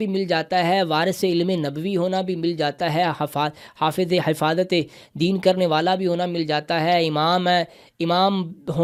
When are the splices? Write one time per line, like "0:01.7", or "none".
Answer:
none

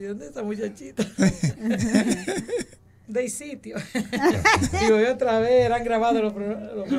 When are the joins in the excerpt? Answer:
none

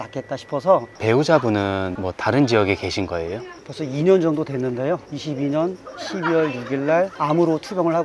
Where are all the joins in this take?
0:00.9
0:03.6
0:05.1

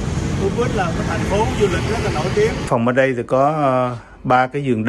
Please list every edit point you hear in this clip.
0:02.6

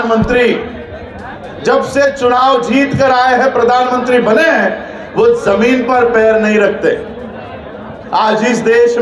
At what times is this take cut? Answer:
none

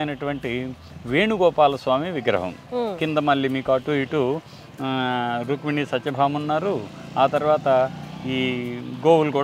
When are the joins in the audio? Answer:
none

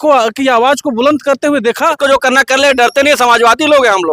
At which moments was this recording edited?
0:01.9

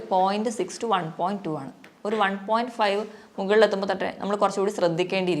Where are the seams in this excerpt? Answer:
none

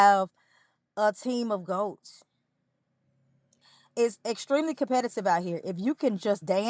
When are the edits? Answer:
none

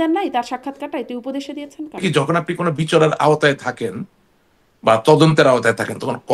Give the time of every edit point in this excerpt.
0:02.0

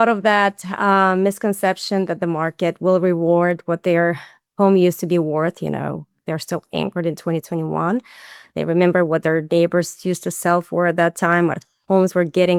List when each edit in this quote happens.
none

